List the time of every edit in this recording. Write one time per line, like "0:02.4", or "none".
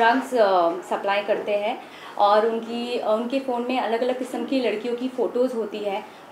none